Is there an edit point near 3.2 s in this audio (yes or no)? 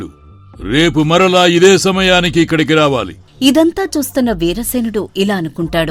yes